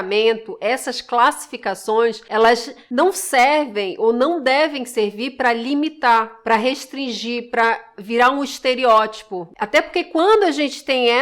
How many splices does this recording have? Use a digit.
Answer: 2